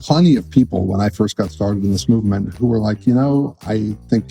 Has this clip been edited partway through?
yes; 1 cut; at 2.5 s

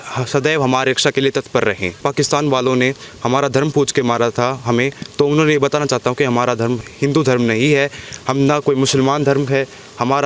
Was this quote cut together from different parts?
yes; 2 cuts; at 2.0 s, 6.8 s

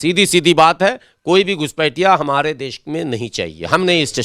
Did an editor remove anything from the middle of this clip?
no; 0 cuts

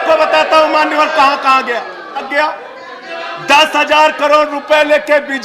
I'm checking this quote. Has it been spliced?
yes; 1 cut; at 2.3 s

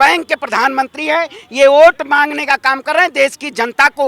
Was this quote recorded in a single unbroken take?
yes; 0 cuts

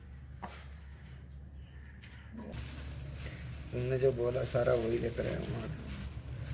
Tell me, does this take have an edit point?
yes; 1 cut; at 2.5 s

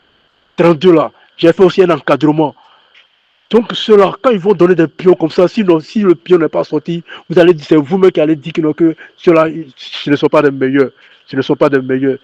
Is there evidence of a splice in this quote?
no; 0 cuts

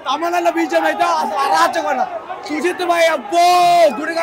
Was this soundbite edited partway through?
no; 0 cuts

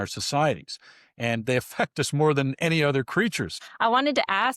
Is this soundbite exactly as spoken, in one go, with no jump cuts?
no; 1 cut; at 3.6 s

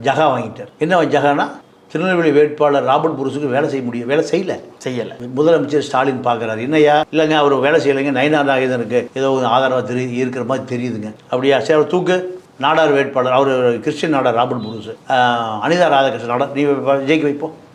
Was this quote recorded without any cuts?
yes; 0 cuts

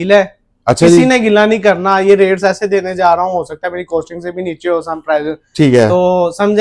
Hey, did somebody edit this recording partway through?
no; 0 cuts

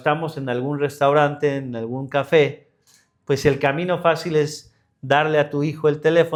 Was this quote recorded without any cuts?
yes; 0 cuts

